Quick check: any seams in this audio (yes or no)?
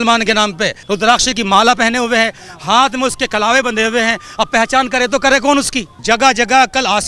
yes